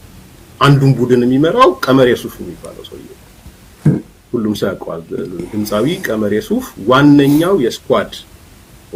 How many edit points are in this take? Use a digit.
0